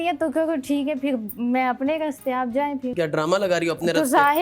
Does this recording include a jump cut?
yes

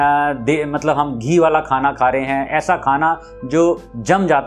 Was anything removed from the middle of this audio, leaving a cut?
no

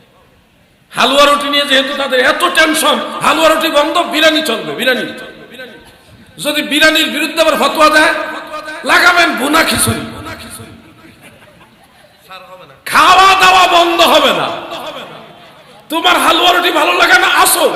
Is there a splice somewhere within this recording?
no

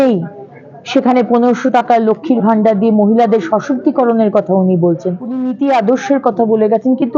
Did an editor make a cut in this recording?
yes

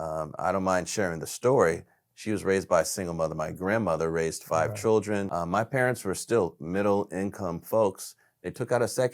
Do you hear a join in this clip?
yes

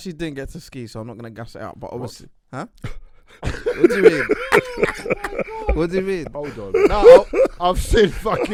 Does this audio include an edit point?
no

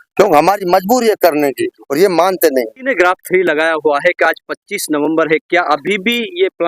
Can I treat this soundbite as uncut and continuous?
no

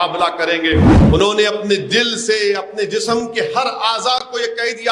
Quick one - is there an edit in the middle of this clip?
yes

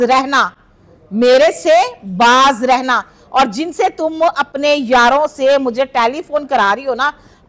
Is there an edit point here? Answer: no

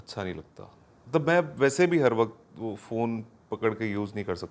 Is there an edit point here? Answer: no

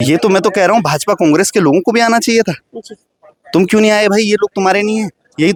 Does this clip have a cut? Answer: no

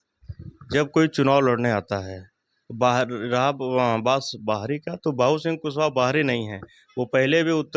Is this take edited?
no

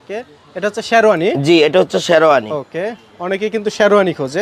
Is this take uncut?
yes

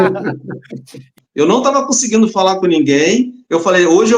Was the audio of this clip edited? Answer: yes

